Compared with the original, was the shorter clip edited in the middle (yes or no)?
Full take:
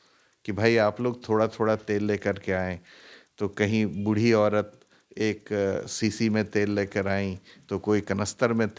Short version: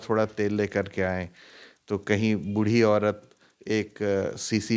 no